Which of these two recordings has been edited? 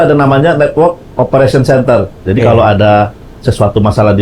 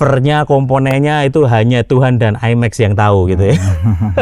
first; 1 cut; at 2.2 s

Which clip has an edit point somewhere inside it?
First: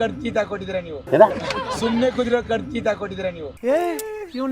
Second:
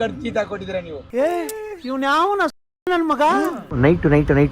second; 2 cuts; at 0.9 s, 3.6 s

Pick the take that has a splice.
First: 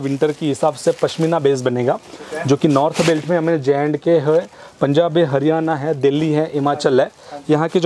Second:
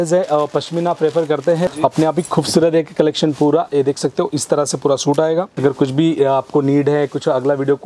second; 2 cuts; at 1.7 s, 5.5 s

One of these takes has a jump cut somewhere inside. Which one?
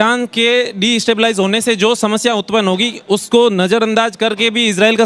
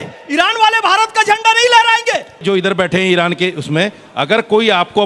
second; 1 cut; at 2.4 s

